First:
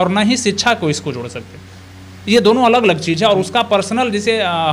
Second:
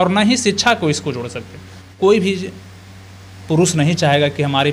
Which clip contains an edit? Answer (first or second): second